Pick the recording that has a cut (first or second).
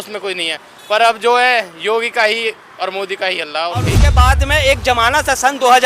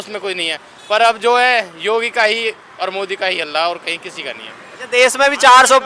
first